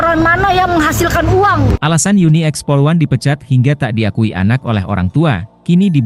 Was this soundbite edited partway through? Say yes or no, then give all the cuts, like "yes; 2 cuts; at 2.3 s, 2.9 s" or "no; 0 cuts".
no; 0 cuts